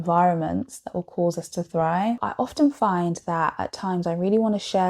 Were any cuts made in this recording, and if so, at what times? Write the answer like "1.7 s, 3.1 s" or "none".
2.2 s

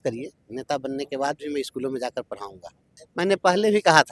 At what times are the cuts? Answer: 3.0 s

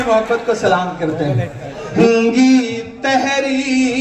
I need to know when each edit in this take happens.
1.9 s

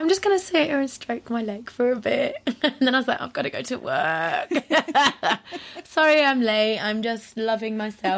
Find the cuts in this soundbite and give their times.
none

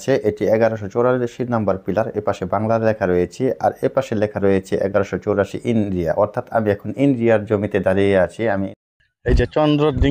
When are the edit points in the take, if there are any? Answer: 8.7 s

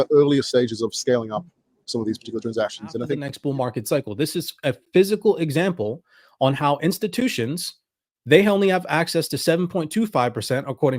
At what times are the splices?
3.3 s

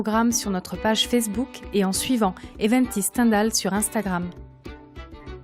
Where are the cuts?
4.3 s

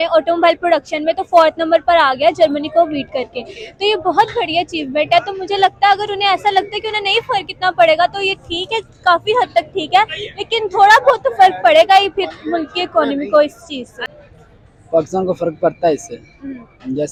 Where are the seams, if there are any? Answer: none

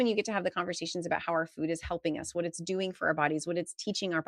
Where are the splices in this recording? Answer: none

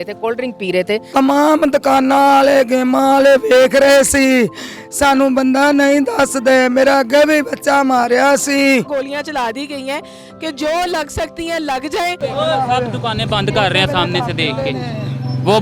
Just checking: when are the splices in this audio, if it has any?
1.1 s, 8.9 s, 12.2 s

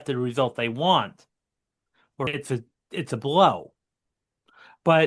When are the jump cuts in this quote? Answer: 2.3 s

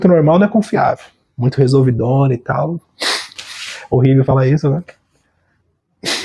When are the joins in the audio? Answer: none

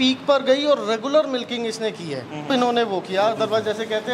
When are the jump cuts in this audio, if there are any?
2.5 s

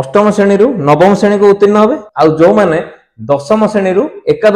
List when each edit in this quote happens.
2.0 s

